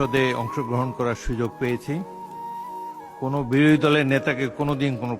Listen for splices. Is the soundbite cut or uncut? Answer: uncut